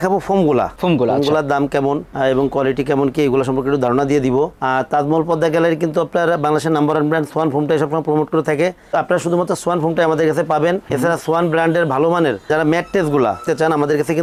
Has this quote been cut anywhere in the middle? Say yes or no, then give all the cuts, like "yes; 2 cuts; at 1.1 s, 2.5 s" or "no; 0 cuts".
no; 0 cuts